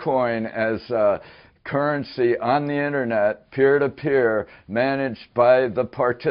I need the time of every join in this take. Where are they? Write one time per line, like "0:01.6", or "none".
none